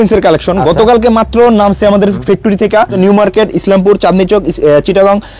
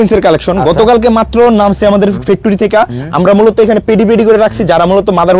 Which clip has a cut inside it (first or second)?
first